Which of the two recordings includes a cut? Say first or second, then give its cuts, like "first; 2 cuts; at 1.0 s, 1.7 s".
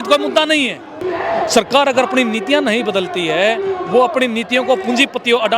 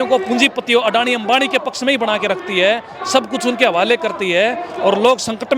first; 1 cut; at 0.9 s